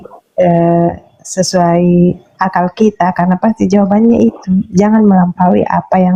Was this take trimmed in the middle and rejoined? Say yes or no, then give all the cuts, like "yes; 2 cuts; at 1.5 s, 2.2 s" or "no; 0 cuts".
no; 0 cuts